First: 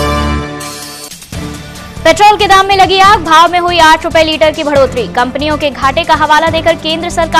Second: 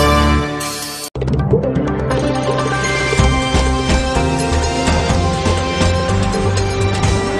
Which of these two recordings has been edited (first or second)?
first